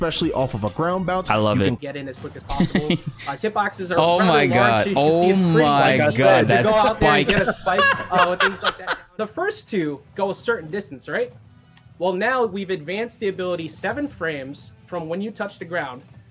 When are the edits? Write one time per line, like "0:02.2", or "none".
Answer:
0:01.8
0:09.0